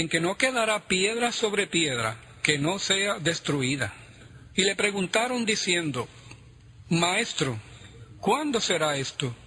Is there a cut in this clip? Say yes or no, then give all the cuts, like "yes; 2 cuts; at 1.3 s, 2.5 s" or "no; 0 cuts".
no; 0 cuts